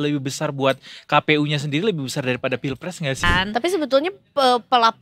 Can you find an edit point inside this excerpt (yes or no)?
yes